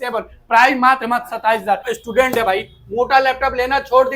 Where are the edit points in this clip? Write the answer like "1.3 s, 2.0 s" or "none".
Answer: 1.9 s